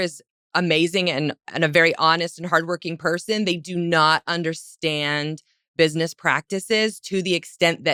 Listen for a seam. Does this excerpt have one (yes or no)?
no